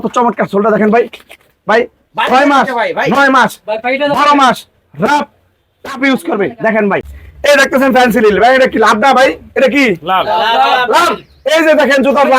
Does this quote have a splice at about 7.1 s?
yes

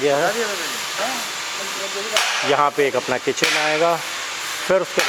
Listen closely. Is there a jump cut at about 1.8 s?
no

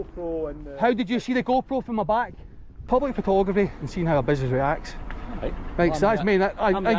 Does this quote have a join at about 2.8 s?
yes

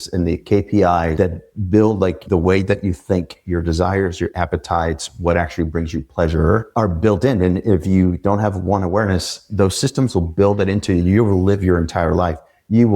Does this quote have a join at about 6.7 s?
yes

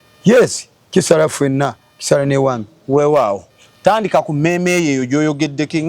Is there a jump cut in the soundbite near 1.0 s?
no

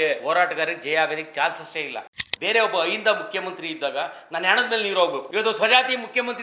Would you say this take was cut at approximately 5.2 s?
yes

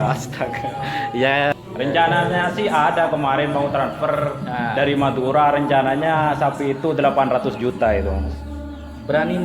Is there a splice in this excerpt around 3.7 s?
no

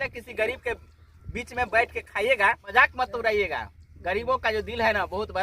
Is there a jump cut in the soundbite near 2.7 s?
yes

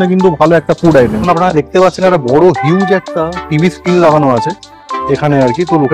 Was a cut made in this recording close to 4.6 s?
no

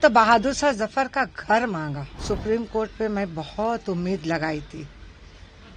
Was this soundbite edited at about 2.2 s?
yes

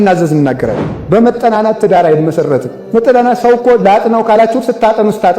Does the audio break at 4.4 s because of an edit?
no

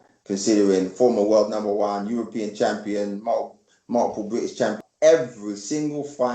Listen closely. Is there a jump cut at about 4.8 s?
yes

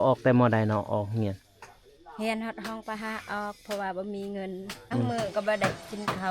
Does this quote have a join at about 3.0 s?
no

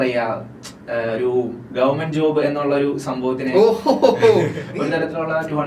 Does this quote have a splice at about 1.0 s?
no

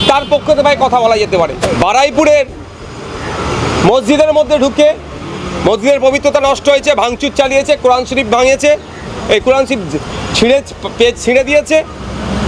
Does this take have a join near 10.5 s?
no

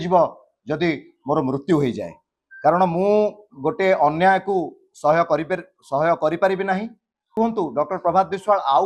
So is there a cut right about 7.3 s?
yes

